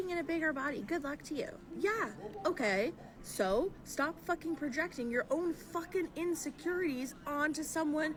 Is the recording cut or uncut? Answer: uncut